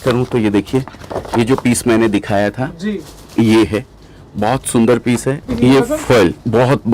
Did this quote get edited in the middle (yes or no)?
yes